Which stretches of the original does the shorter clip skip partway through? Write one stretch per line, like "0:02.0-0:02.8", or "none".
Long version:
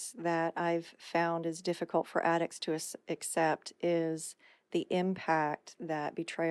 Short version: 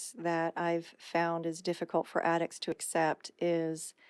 0:02.8-0:03.2